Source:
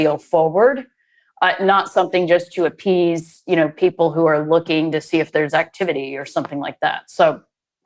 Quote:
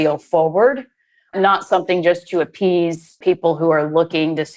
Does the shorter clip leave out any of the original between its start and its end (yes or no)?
yes